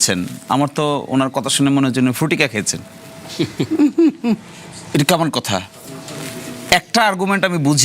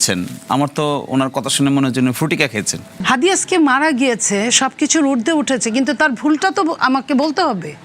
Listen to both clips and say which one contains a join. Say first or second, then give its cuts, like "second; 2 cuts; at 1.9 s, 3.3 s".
second; 1 cut; at 3.0 s